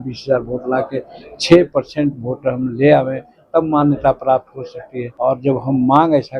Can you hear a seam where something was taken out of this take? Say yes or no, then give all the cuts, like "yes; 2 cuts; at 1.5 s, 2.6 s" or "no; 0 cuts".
yes; 1 cut; at 5.0 s